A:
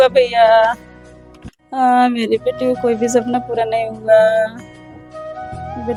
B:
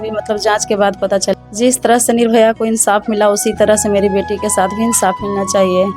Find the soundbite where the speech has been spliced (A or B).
B